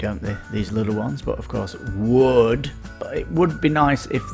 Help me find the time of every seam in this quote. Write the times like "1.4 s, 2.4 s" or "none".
3.0 s